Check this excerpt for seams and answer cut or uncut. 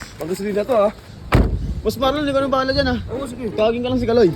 cut